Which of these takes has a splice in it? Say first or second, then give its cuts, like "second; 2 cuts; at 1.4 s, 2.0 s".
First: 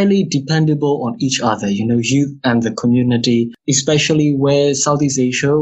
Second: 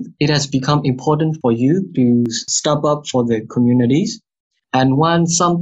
second; 1 cut; at 4.5 s